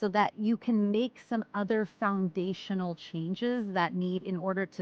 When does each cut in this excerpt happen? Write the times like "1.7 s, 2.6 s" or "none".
none